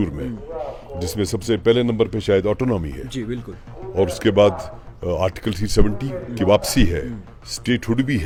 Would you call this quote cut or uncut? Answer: uncut